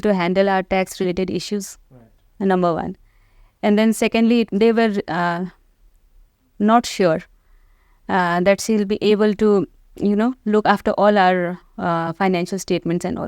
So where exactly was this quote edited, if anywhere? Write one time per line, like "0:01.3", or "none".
none